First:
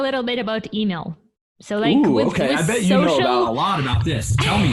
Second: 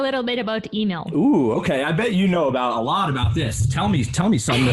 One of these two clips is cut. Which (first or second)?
second